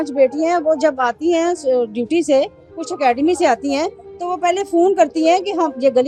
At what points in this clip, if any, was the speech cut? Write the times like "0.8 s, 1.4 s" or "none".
none